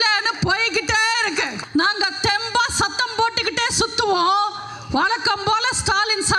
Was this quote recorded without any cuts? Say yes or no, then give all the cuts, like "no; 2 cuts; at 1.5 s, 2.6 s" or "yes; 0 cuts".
no; 1 cut; at 1.6 s